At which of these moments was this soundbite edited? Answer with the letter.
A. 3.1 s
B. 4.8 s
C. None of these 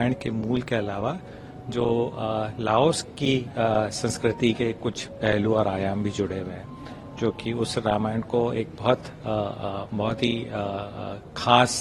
C